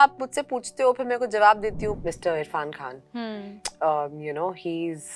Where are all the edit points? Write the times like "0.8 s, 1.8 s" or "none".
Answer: 2.0 s